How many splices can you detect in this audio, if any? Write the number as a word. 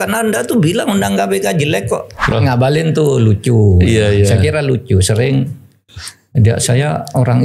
one